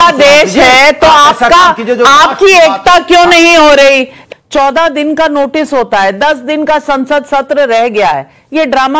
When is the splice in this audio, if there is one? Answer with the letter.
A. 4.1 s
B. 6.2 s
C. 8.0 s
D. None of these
A